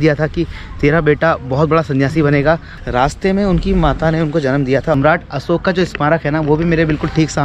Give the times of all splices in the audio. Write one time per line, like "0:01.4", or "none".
0:02.8
0:04.9